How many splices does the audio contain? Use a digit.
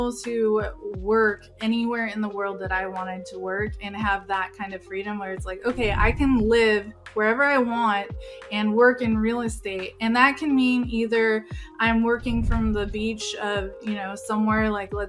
0